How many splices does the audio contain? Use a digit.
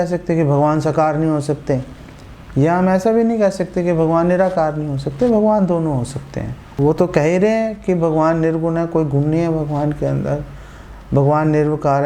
1